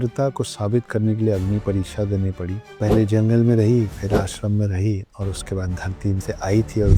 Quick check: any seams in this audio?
no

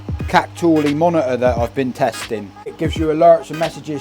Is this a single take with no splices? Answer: no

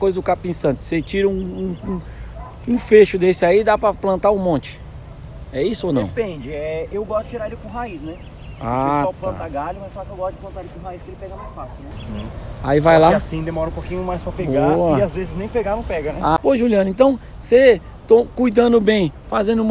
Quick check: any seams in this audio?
yes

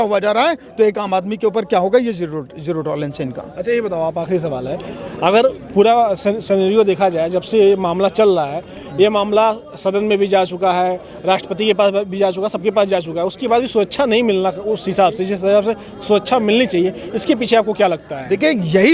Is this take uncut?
yes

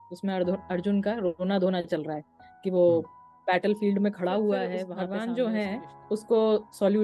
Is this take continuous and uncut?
no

